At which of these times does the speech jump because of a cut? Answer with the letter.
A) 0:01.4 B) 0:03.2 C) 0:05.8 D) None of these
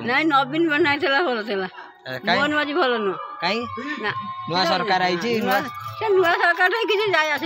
D